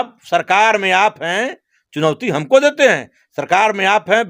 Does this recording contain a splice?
no; 0 cuts

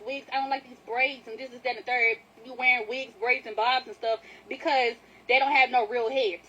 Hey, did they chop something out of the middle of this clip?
yes; 1 cut; at 5.1 s

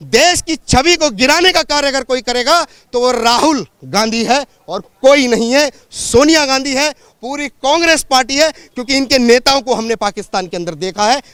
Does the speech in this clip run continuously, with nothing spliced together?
yes; 0 cuts

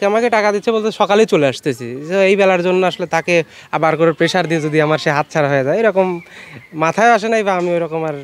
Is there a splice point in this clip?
no; 0 cuts

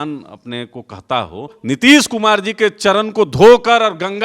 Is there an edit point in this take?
yes; 1 cut; at 1.6 s

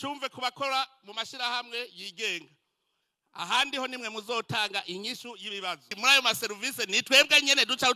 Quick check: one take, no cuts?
no; 1 cut; at 5.9 s

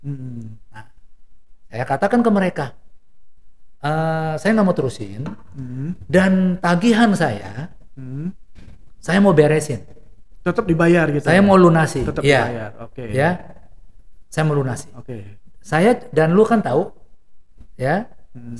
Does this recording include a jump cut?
no; 0 cuts

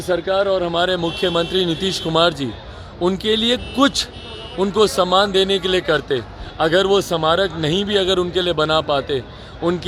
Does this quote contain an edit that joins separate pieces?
no; 0 cuts

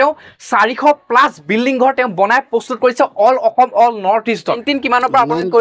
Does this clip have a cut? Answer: yes; 1 cut; at 4.6 s

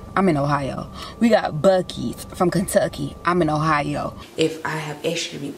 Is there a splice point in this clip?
yes; 1 cut; at 4.2 s

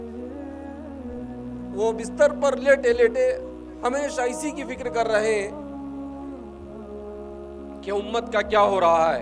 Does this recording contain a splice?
no; 0 cuts

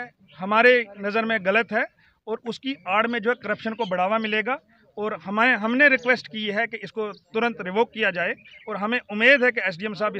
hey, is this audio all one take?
yes; 0 cuts

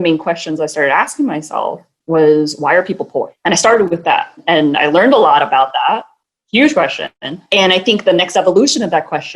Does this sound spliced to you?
yes; 4 cuts; at 1.9 s, 3.3 s, 4.4 s, 7.4 s

